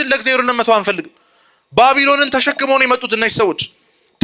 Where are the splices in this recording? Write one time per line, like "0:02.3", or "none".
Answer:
none